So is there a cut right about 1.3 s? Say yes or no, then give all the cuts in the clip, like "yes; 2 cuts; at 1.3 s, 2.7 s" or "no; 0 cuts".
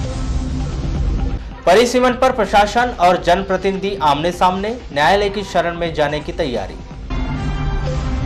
yes; 1 cut; at 1.3 s